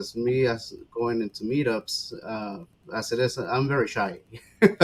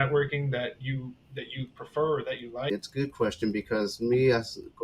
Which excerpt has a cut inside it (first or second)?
second